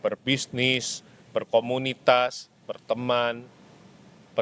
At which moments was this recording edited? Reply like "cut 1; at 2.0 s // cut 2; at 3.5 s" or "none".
none

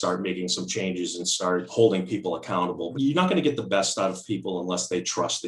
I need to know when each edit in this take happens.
cut 1; at 1.7 s // cut 2; at 2.9 s

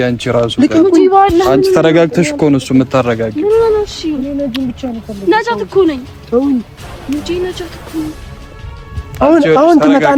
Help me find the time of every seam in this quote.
none

